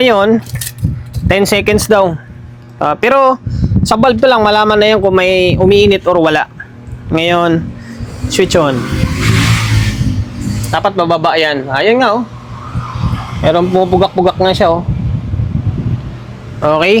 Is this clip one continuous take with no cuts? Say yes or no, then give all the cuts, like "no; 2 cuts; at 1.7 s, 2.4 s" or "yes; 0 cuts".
yes; 0 cuts